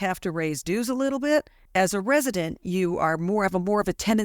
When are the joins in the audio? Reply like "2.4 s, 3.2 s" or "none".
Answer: 1.6 s